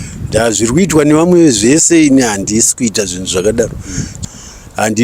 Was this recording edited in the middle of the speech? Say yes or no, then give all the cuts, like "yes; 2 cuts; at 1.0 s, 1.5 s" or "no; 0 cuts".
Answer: yes; 1 cut; at 4.1 s